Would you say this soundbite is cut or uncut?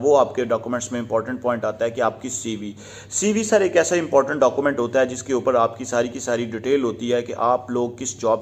uncut